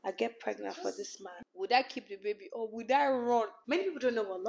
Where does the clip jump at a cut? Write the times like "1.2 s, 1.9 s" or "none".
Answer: 1.3 s, 3.6 s